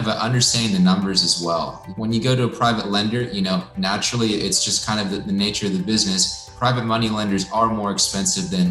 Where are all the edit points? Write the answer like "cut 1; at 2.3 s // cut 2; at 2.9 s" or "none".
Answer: cut 1; at 1.8 s // cut 2; at 6.5 s